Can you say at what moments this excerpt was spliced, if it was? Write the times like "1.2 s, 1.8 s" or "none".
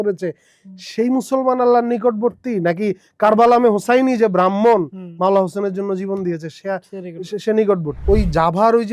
8.0 s